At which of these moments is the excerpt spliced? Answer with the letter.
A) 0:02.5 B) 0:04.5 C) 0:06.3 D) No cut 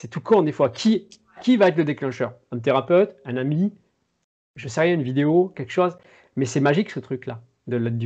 D